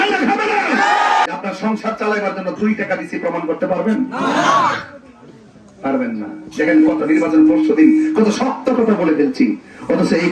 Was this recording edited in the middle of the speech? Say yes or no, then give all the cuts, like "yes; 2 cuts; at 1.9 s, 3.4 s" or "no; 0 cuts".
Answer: yes; 1 cut; at 1.3 s